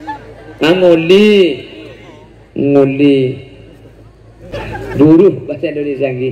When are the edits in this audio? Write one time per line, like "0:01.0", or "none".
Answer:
0:04.5